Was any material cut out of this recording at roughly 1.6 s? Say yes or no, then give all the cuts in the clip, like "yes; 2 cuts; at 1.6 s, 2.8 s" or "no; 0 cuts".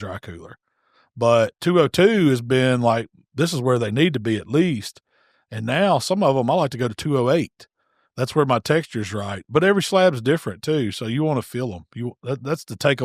yes; 1 cut; at 1.6 s